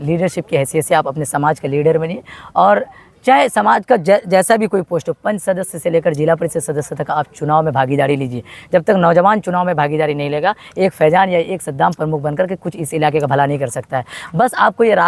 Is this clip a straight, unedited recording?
yes; 0 cuts

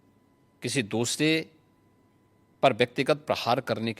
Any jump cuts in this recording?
no; 0 cuts

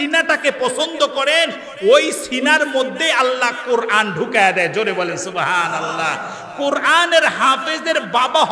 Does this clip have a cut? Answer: no; 0 cuts

